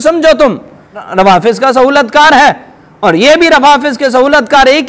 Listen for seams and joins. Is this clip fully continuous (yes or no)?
no